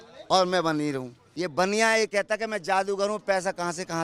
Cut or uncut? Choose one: cut